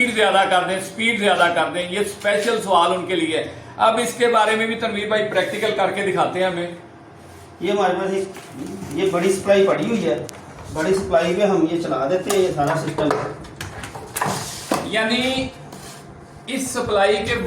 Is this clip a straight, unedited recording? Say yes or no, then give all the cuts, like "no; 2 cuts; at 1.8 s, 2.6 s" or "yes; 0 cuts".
yes; 0 cuts